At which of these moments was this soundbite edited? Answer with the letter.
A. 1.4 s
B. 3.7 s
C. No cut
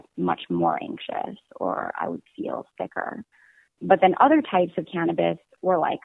B